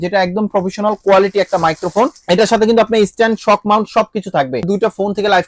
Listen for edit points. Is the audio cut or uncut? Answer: cut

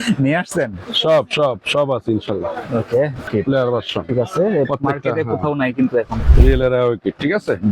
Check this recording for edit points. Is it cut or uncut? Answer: cut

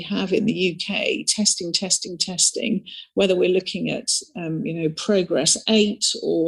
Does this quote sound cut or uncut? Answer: uncut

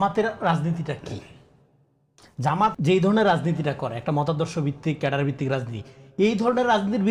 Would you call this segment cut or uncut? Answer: uncut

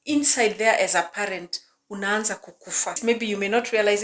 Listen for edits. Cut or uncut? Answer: cut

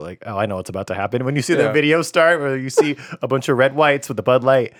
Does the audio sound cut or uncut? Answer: uncut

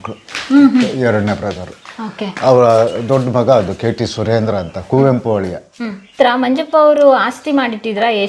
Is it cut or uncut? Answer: cut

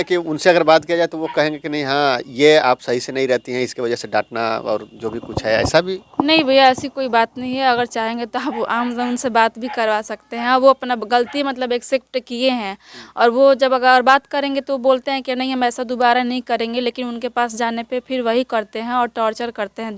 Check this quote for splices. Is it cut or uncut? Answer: uncut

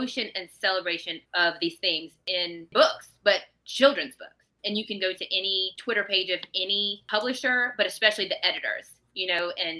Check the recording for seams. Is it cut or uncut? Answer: cut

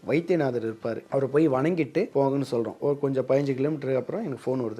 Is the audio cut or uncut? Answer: cut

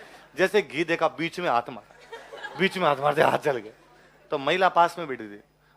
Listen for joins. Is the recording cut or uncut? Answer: uncut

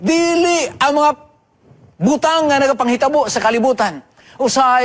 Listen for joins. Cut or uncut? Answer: uncut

